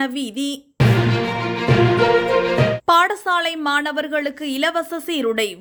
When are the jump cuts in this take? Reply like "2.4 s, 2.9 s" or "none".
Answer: none